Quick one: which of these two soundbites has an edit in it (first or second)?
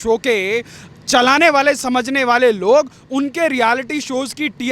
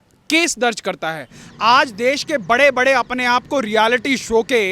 second